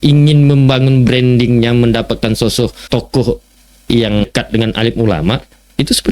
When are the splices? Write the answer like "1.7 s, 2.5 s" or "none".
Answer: 2.8 s, 4.2 s